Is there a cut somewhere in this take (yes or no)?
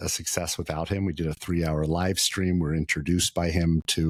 no